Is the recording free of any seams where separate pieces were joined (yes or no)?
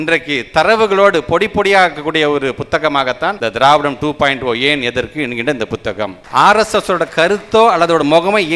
no